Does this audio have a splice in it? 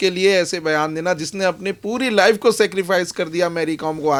no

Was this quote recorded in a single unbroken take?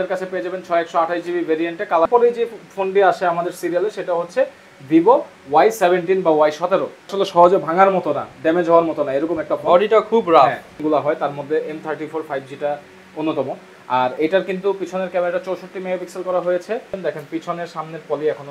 no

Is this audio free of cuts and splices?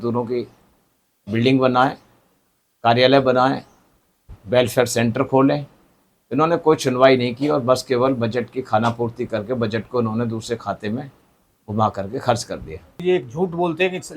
no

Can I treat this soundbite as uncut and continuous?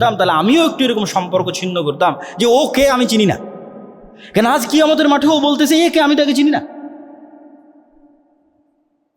yes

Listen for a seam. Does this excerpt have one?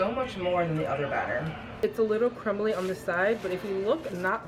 yes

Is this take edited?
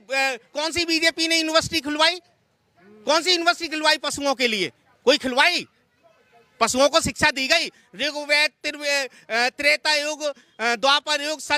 no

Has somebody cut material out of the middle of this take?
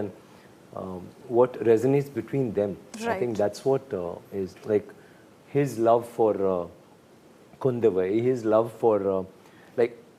no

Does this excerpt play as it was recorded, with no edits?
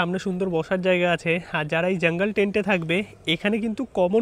yes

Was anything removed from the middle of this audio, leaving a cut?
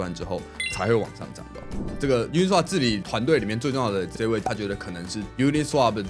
yes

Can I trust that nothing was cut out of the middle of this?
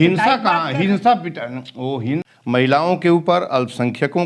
no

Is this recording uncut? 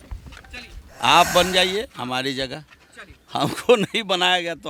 yes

